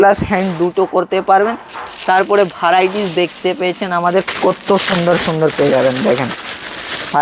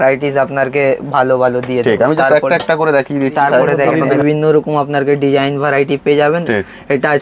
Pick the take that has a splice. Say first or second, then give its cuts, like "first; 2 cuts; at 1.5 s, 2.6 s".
second; 1 cut; at 4.1 s